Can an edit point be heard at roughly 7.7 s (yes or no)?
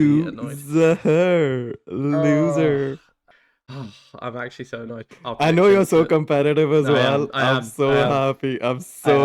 no